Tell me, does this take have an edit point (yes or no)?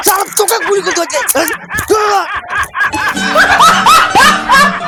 no